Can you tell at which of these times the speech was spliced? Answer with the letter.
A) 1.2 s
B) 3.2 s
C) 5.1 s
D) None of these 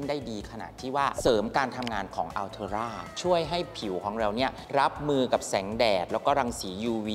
B